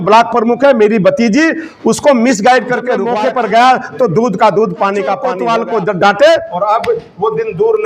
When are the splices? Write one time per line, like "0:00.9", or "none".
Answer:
0:03.0
0:05.3
0:06.5